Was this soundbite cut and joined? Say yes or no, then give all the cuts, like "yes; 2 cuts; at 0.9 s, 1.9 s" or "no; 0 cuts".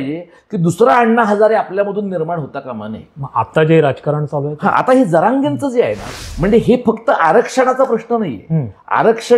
yes; 1 cut; at 6.0 s